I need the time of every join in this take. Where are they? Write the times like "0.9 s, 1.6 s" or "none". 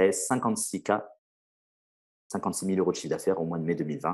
none